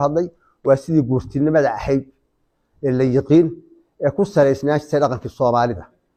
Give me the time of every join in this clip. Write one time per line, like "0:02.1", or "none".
none